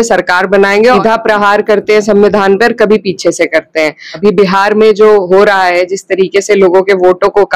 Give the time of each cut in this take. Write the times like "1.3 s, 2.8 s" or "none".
1.0 s, 4.1 s

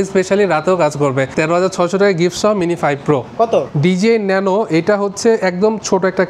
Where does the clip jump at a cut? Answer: 1.3 s, 3.7 s

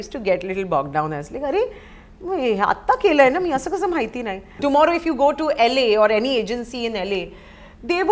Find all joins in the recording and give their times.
4.6 s

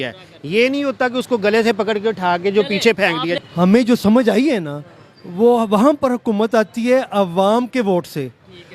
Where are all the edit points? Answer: 3.4 s

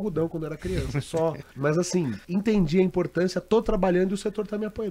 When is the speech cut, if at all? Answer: 1.5 s, 2.2 s

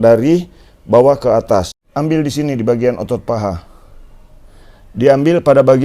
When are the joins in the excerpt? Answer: 1.8 s

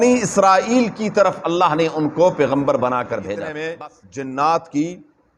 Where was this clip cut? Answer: 3.3 s

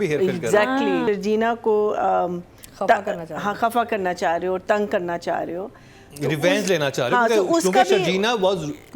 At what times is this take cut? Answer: 1.0 s

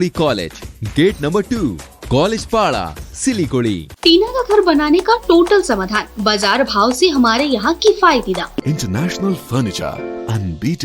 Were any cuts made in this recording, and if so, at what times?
3.9 s, 8.6 s

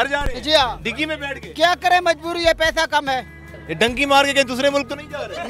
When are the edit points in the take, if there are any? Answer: 3.4 s

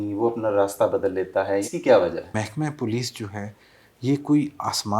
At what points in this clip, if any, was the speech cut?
1.6 s, 2.4 s

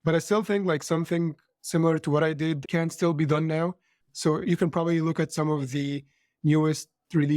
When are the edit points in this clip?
4.0 s

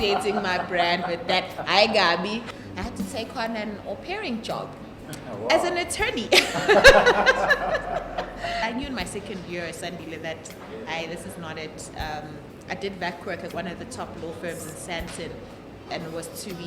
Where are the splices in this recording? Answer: 2.5 s, 8.6 s

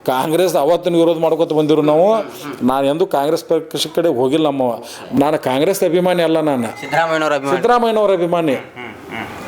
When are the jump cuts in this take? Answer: 4.9 s

